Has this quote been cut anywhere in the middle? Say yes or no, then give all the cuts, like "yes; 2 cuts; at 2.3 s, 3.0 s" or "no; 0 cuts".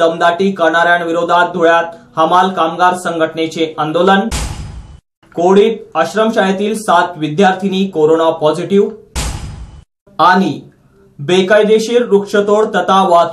no; 0 cuts